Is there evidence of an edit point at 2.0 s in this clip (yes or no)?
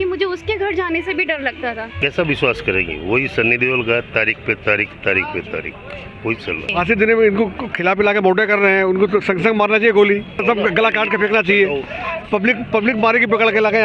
yes